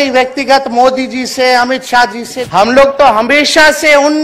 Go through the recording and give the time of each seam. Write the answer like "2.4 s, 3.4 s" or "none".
2.4 s